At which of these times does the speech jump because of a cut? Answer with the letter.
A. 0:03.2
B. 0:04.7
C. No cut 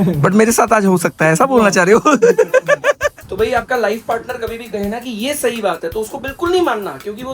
A